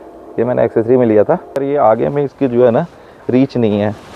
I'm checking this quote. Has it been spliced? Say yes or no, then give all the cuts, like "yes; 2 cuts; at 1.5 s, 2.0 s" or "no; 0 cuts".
yes; 1 cut; at 1.5 s